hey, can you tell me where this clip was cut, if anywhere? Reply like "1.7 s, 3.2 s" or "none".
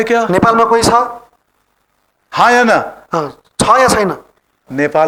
none